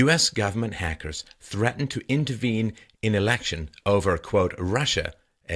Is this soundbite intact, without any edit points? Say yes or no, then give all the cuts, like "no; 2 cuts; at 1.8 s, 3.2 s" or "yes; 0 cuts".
no; 1 cut; at 2.5 s